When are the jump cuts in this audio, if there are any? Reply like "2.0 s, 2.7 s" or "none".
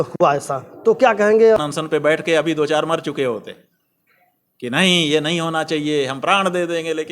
1.6 s